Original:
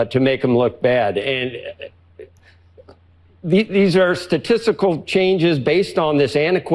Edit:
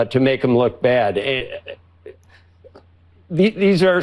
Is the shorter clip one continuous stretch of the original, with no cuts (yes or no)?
no